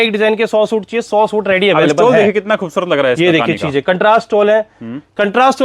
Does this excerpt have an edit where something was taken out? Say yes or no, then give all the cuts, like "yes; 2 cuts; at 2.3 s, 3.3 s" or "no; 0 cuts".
no; 0 cuts